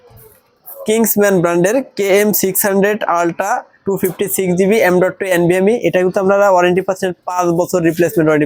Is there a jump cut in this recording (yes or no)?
no